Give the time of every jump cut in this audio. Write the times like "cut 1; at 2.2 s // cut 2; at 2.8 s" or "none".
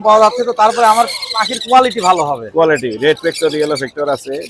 none

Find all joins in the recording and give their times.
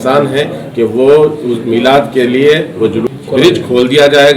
cut 1; at 3.0 s

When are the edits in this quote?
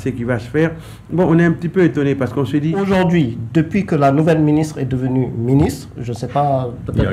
cut 1; at 2.8 s

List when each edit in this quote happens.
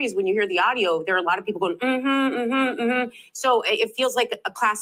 none

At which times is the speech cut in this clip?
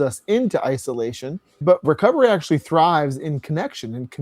cut 1; at 1.9 s

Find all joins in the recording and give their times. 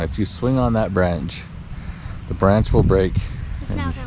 none

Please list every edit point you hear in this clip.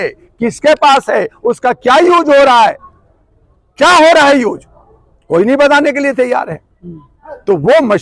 none

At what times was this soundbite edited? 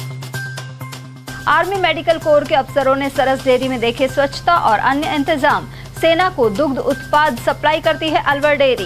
cut 1; at 1.2 s

